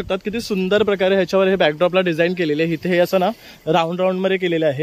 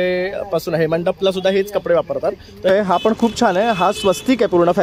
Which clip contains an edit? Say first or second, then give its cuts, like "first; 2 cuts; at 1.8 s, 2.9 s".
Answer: second; 1 cut; at 2.7 s